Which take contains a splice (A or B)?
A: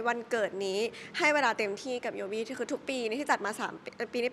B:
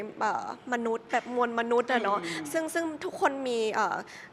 B